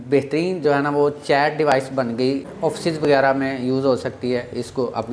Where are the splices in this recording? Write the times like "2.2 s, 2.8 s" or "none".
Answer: 2.5 s